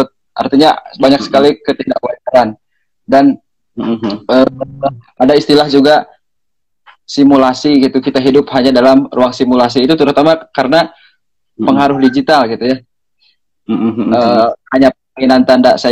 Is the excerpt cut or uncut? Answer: cut